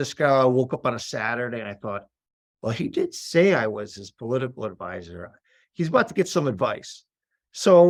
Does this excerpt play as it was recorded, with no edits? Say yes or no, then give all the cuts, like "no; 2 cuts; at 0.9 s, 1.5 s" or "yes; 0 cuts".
yes; 0 cuts